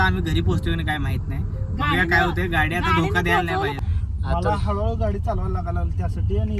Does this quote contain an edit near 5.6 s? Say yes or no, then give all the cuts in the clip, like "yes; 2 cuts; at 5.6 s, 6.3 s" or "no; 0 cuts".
no; 1 cut; at 3.8 s